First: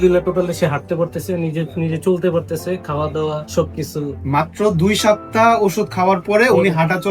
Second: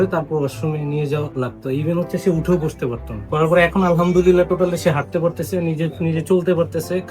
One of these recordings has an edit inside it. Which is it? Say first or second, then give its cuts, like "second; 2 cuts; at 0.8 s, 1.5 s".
second; 1 cut; at 3.2 s